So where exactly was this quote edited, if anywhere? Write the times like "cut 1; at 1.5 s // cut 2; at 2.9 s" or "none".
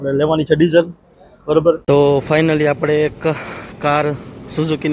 cut 1; at 1.8 s